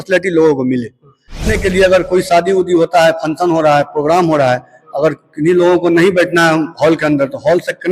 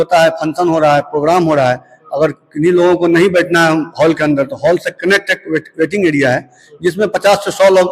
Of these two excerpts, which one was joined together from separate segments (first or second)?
first